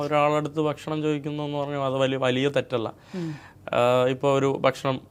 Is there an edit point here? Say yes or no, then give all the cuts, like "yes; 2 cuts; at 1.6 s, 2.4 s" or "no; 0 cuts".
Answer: no; 0 cuts